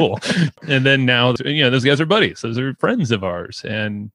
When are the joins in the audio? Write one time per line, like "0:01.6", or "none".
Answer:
0:01.3
0:02.7